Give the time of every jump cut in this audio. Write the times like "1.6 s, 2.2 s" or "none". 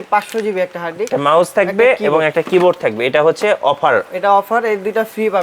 1.1 s